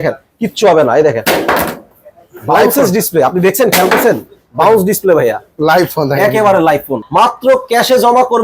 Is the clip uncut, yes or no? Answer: no